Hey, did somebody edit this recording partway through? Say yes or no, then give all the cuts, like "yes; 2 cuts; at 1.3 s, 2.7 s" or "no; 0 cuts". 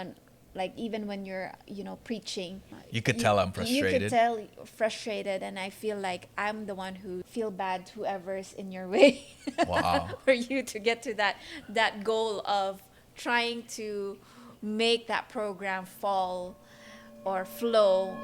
yes; 2 cuts; at 2.7 s, 7.3 s